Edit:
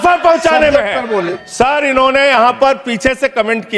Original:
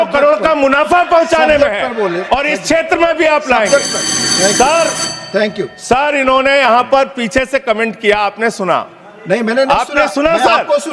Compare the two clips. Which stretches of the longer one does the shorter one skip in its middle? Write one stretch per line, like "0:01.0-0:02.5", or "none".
0:02.2-0:05.6